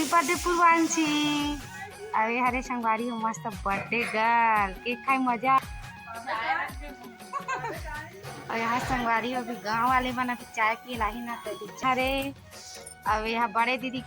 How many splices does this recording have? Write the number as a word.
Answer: two